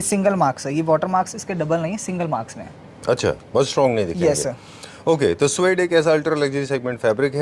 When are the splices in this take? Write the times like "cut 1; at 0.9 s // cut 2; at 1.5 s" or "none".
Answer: none